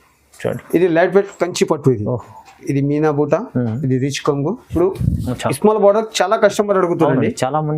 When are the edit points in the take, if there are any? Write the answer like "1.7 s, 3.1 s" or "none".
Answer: 4.6 s